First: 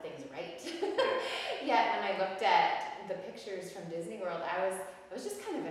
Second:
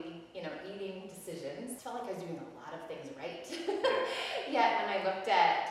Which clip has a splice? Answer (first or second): second